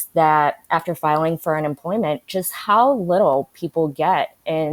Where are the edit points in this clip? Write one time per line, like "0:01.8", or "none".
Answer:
none